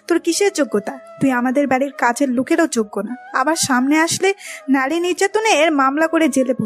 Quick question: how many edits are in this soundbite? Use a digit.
1